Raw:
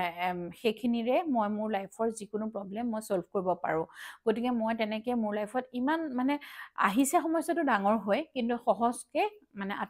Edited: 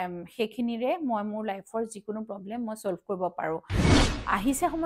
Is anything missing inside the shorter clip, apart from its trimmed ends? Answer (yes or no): yes